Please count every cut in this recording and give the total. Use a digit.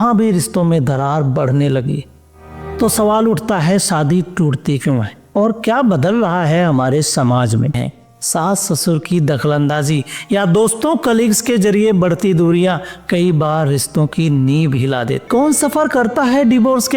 2